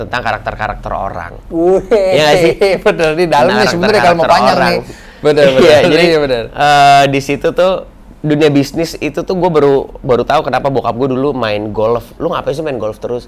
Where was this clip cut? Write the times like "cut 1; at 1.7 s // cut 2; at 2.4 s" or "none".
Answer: none